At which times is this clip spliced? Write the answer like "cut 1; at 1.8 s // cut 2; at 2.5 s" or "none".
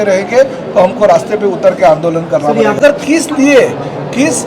cut 1; at 2.8 s